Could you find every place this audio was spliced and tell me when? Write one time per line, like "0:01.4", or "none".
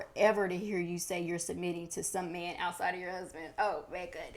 none